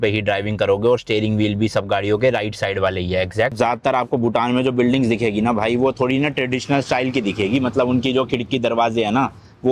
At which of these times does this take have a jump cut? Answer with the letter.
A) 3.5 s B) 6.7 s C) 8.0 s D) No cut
A